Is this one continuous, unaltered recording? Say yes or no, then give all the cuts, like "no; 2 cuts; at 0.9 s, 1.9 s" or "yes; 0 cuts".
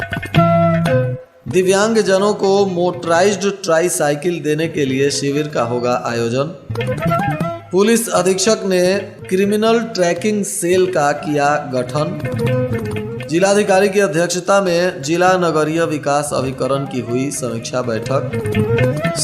no; 1 cut; at 1.2 s